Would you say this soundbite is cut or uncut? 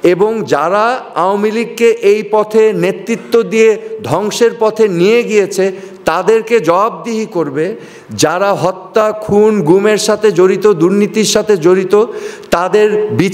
uncut